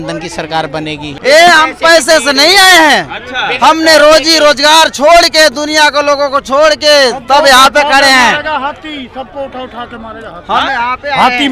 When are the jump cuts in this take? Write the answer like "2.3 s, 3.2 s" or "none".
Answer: 1.1 s